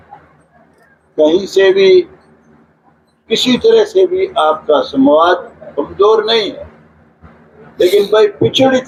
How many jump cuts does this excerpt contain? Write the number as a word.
zero